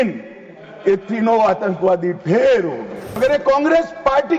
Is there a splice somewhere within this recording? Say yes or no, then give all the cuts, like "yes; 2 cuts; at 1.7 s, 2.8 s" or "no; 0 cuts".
yes; 1 cut; at 3.2 s